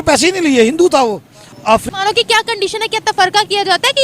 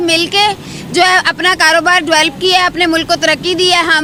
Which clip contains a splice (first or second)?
first